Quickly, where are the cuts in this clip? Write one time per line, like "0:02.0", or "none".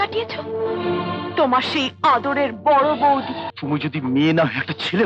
0:03.4